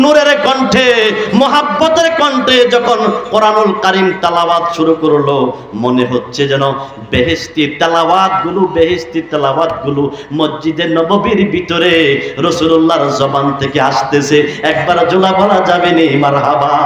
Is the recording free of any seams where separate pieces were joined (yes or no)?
yes